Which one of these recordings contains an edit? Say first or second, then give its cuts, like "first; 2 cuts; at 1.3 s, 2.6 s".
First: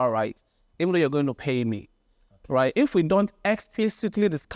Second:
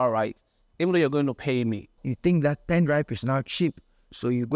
second; 1 cut; at 2.0 s